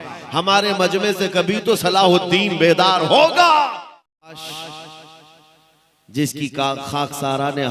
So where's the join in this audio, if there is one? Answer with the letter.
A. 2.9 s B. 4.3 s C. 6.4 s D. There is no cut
B